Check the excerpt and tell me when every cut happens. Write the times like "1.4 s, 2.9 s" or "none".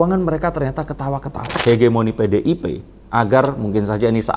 1.6 s